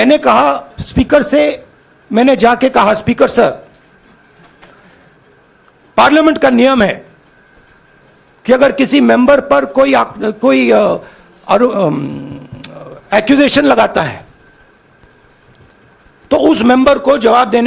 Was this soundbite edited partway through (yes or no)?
no